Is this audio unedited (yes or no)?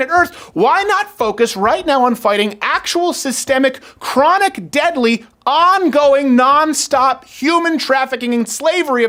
yes